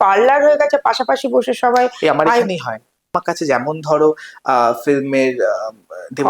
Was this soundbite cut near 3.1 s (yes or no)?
yes